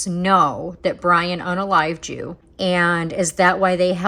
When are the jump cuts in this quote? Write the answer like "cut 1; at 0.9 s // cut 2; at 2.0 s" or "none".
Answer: cut 1; at 2.4 s